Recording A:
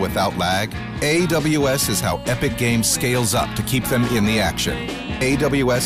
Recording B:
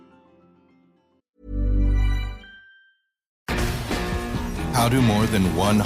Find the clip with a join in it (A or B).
B